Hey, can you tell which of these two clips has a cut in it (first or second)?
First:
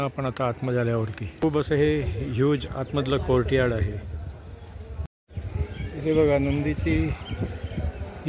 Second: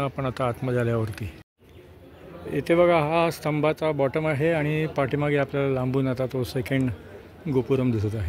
first